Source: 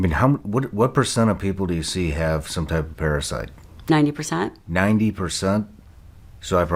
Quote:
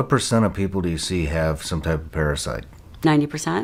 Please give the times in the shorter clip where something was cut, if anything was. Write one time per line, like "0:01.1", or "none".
none